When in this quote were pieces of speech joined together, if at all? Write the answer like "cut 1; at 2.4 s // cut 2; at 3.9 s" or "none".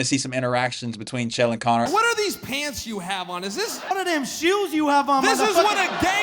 cut 1; at 1.9 s // cut 2; at 3.9 s